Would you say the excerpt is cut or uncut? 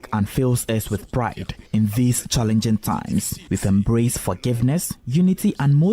cut